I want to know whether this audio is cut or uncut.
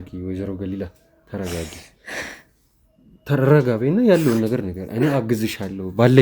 uncut